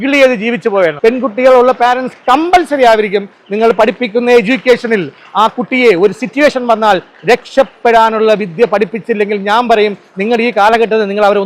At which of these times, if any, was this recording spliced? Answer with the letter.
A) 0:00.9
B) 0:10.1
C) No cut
A